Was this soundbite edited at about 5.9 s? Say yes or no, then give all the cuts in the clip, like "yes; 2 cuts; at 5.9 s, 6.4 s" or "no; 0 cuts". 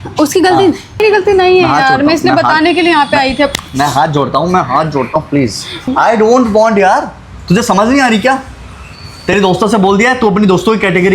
yes; 2 cuts; at 1.0 s, 5.9 s